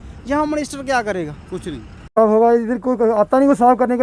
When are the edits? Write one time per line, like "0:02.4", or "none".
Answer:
0:02.1